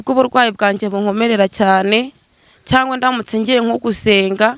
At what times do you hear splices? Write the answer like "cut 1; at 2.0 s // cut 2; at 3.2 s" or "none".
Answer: none